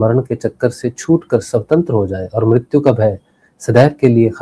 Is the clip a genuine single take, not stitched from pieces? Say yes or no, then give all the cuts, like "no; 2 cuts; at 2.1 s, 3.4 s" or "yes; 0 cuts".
yes; 0 cuts